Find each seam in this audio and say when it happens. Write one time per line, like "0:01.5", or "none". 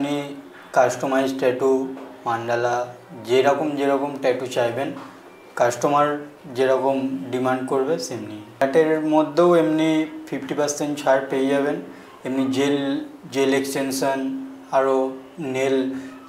0:08.6